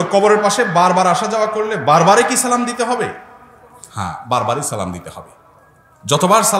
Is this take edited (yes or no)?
no